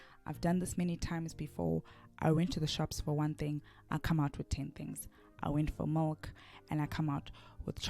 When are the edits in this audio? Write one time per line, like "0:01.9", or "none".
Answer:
0:01.1